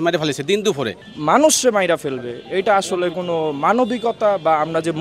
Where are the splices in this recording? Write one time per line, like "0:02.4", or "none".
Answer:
0:01.0